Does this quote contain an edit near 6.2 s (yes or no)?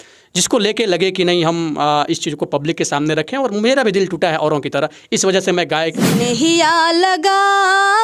yes